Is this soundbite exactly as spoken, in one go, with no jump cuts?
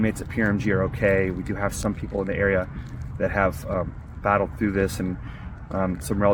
yes; 0 cuts

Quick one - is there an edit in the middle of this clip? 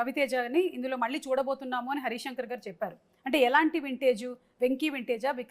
no; 0 cuts

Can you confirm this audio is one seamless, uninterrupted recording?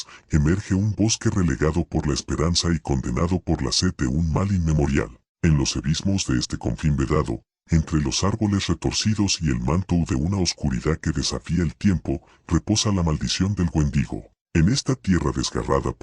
no; 1 cut; at 14.4 s

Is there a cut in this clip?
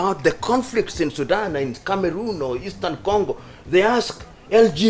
no; 0 cuts

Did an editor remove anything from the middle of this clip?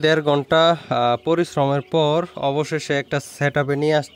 no; 0 cuts

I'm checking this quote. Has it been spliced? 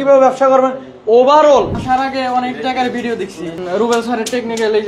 yes; 2 cuts; at 1.8 s, 3.6 s

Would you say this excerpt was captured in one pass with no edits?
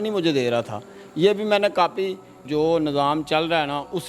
no; 1 cut; at 2.4 s

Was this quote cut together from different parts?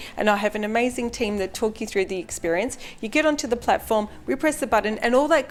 no; 0 cuts

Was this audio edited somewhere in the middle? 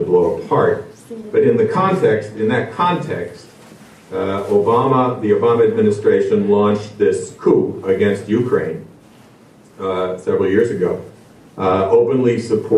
yes; 1 cut; at 3.0 s

